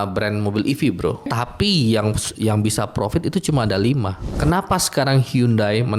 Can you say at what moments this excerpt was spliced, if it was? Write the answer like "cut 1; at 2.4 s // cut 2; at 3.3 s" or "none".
cut 1; at 1.3 s // cut 2; at 4.3 s